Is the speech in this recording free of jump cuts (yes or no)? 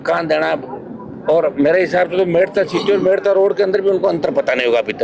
yes